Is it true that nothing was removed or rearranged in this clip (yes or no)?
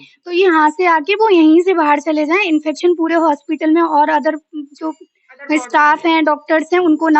yes